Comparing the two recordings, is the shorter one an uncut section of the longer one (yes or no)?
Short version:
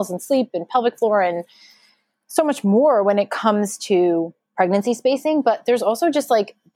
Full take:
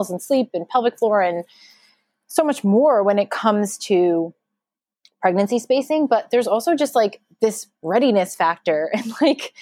no